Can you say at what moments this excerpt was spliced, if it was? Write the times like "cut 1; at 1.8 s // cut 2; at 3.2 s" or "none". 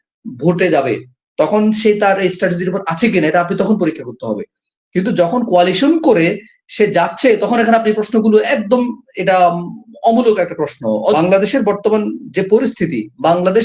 cut 1; at 11.2 s